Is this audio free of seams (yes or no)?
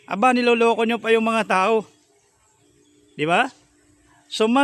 yes